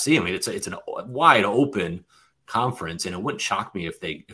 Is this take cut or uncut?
uncut